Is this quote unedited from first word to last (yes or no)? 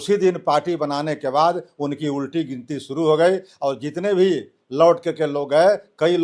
yes